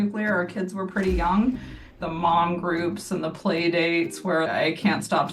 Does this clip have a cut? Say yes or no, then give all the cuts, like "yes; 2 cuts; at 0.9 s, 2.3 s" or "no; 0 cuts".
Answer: yes; 1 cut; at 1.9 s